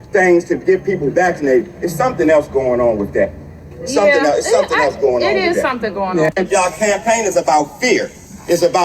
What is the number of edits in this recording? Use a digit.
1